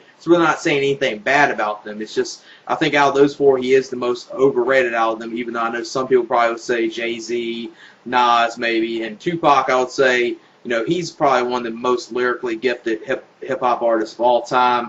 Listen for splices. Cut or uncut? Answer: cut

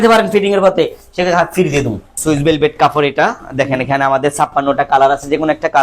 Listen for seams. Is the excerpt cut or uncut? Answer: cut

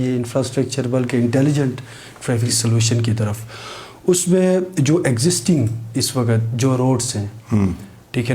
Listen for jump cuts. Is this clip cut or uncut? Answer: uncut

